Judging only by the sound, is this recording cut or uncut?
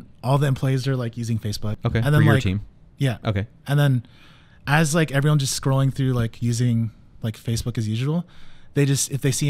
cut